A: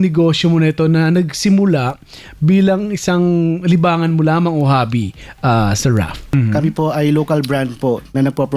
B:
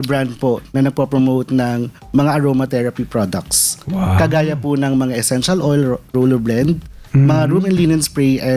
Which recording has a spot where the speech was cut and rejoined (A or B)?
A